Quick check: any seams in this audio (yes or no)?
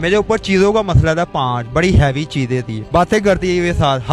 yes